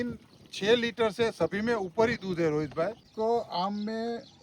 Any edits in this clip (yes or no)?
yes